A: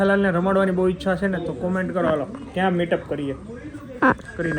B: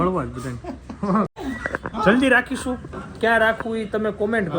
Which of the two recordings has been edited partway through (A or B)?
B